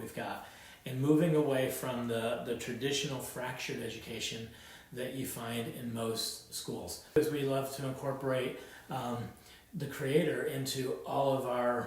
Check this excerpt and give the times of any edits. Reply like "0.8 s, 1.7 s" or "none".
7.2 s